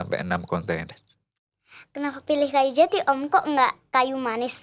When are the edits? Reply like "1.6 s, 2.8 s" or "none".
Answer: 1.4 s

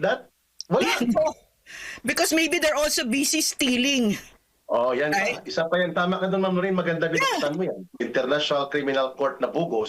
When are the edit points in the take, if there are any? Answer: 8.1 s

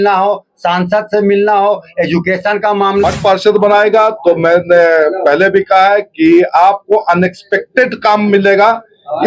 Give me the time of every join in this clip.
3.0 s

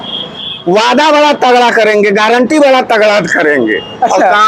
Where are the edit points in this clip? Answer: none

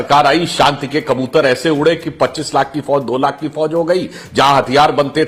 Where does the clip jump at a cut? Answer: none

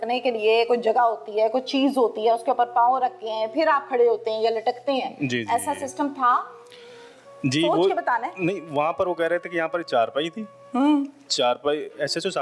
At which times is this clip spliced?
none

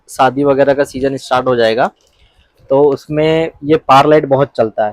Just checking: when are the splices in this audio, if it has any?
none

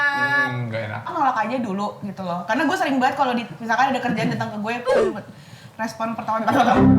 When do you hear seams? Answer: 1.1 s

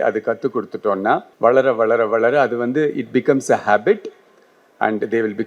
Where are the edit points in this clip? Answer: 1.3 s

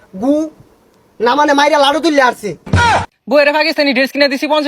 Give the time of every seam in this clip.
2.8 s

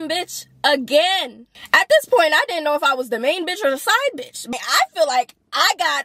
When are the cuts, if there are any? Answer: 1.5 s, 4.3 s

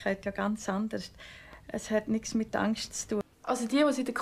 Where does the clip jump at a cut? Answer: 3.3 s

